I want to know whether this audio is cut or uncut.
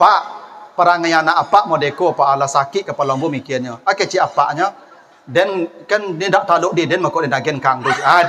uncut